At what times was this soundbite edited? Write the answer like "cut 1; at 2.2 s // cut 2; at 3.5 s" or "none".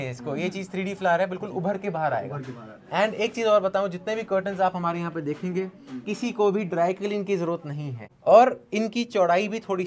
cut 1; at 8.1 s